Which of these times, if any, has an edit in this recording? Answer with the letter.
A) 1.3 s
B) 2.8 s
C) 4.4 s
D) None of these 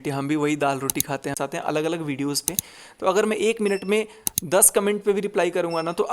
A